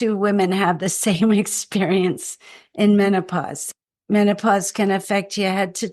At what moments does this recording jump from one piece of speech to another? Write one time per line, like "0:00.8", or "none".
0:03.6

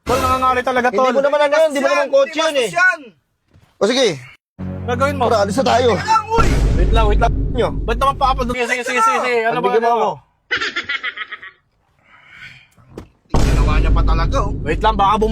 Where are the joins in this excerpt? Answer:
0:04.5
0:08.5

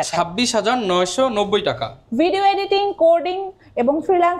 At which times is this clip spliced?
none

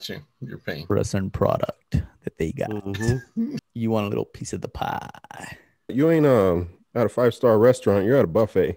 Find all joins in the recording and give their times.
0:03.7
0:05.9

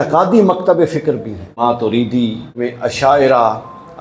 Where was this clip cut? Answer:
0:01.6
0:02.5

